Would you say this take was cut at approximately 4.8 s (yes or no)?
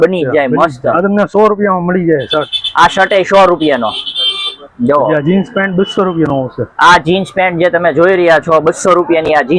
no